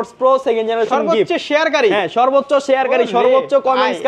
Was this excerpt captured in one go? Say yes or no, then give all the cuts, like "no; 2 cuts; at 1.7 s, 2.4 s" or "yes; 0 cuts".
yes; 0 cuts